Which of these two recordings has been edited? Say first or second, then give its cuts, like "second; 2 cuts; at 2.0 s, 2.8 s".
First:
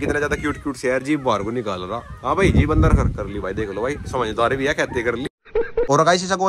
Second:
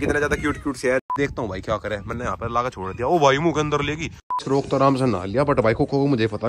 second; 2 cuts; at 1.1 s, 4.3 s